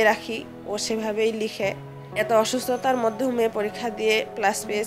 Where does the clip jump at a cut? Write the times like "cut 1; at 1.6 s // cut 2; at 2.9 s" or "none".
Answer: cut 1; at 2.0 s